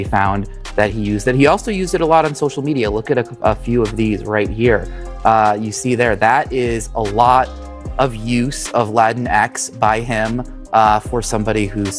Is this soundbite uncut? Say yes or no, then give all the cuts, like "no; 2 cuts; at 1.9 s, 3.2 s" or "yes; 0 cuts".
yes; 0 cuts